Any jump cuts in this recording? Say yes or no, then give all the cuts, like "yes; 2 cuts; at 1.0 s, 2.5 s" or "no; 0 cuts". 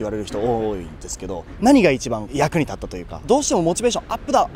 yes; 2 cuts; at 1.5 s, 3.2 s